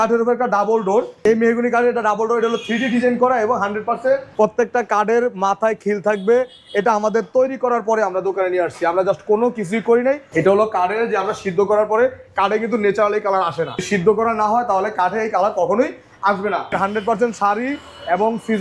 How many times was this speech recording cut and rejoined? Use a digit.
5